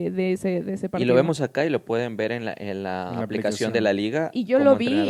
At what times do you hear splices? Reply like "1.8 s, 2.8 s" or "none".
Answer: none